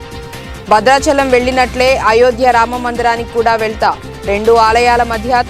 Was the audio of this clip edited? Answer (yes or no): no